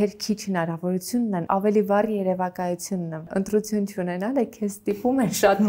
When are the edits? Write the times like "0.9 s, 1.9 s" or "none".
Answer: 3.3 s